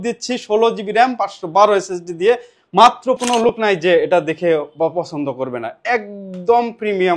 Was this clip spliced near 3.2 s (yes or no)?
yes